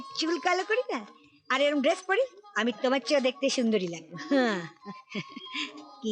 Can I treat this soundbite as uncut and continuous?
yes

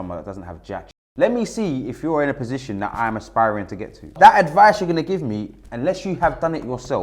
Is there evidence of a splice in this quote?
yes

